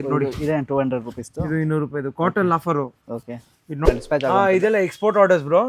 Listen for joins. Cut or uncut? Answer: cut